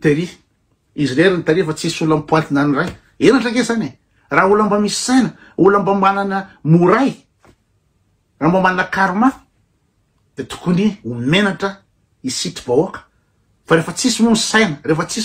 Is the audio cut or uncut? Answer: uncut